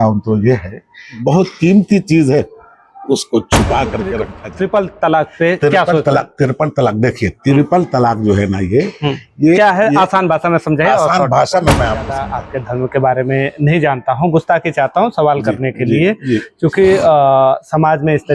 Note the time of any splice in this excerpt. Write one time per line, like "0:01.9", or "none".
0:01.2
0:04.4
0:12.3